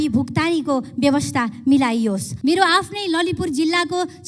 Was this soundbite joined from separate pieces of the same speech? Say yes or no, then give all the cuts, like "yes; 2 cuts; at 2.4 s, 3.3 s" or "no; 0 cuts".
yes; 1 cut; at 2.3 s